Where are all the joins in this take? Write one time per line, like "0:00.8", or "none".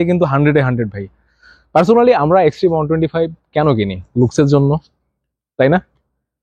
none